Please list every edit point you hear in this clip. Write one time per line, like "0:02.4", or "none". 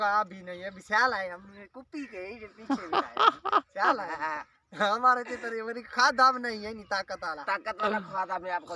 none